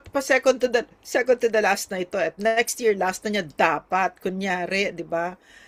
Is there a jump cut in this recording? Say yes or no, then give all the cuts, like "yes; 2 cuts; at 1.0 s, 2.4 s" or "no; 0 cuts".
no; 0 cuts